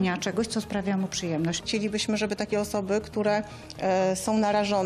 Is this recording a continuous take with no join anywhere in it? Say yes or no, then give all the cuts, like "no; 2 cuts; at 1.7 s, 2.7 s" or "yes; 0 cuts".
no; 1 cut; at 1.6 s